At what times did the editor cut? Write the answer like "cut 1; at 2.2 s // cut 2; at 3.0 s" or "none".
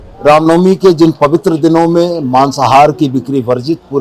none